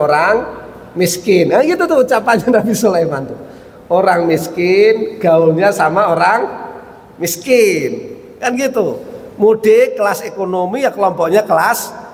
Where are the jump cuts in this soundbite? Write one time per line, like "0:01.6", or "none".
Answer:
none